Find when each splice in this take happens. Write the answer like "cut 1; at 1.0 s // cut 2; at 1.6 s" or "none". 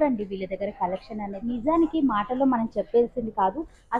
cut 1; at 1.4 s

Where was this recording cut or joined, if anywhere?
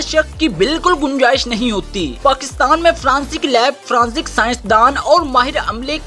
none

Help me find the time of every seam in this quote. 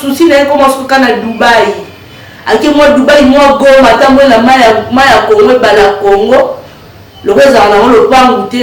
none

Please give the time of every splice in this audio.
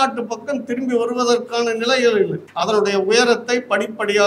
cut 1; at 2.5 s

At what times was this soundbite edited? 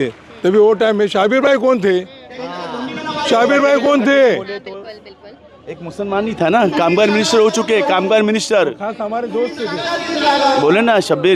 none

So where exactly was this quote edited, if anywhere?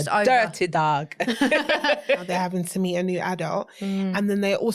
cut 1; at 2.2 s

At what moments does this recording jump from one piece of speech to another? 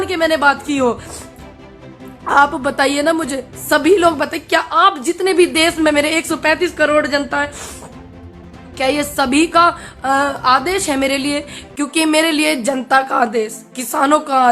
none

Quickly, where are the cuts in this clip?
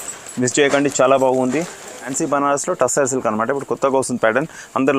cut 1; at 2.1 s

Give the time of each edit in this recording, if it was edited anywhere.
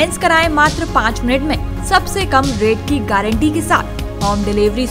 none

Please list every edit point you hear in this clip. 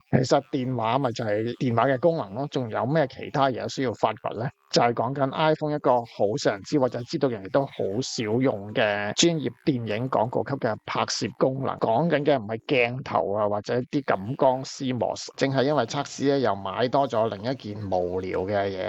cut 1; at 15.3 s

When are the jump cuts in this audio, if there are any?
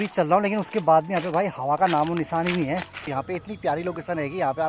cut 1; at 3.1 s

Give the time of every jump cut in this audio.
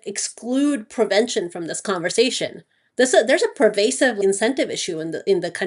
none

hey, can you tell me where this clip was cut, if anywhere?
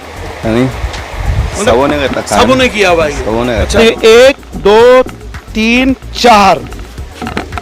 cut 1; at 3.7 s

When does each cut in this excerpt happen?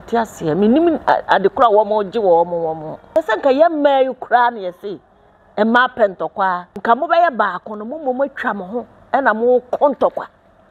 cut 1; at 2.9 s // cut 2; at 6.7 s

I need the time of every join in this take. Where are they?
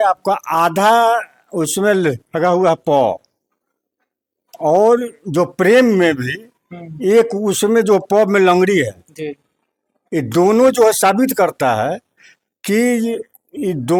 none

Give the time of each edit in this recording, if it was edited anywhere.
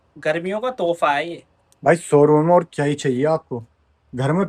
none

